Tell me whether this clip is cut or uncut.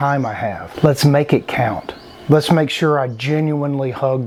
uncut